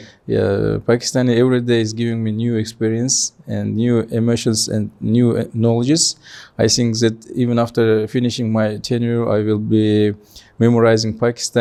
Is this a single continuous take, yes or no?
yes